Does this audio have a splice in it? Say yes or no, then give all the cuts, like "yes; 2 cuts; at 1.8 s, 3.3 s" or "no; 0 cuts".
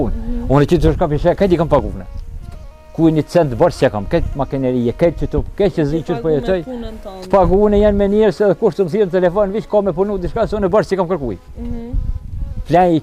no; 0 cuts